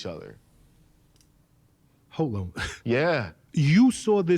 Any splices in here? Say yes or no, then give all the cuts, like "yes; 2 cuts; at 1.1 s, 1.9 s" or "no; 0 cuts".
yes; 1 cut; at 3.4 s